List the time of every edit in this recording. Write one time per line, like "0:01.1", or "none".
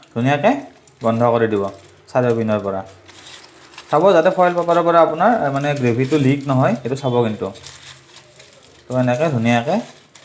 none